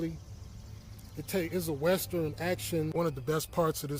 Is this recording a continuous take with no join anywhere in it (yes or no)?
no